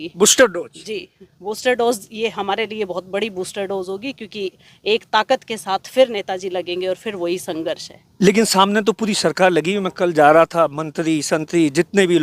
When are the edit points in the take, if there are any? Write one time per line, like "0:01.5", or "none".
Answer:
none